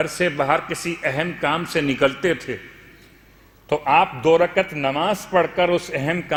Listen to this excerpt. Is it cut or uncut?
uncut